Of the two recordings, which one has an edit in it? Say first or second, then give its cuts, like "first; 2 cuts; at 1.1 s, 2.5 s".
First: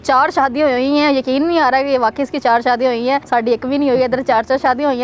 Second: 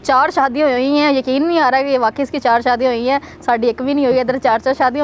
first; 1 cut; at 3.2 s